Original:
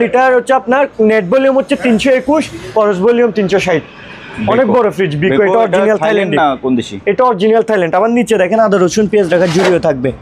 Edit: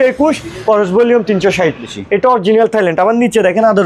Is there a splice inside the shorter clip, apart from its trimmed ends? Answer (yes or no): yes